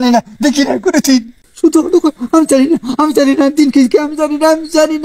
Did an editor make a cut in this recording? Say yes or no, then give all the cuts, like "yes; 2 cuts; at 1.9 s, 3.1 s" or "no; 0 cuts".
yes; 1 cut; at 1.5 s